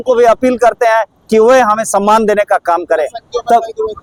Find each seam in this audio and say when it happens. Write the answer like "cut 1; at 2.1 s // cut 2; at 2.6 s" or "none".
none